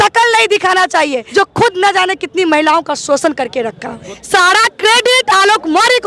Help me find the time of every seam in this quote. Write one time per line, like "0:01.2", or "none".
0:01.2
0:04.1